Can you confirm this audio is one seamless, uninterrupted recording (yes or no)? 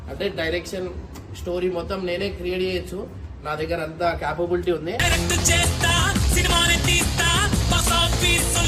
yes